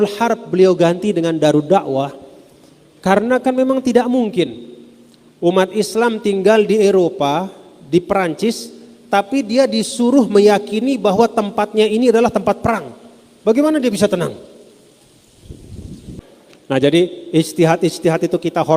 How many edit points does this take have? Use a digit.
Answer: 1